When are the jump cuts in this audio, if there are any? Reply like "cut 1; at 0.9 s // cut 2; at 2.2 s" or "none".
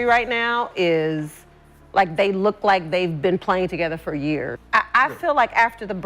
cut 1; at 4.6 s